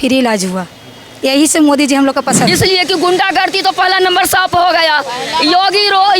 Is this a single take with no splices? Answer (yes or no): no